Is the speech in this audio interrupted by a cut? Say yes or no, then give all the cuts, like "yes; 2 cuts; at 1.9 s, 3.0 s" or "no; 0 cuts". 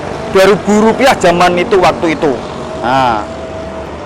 no; 0 cuts